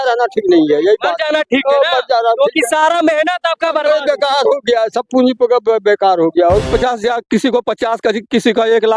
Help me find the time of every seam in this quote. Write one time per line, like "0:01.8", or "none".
0:06.7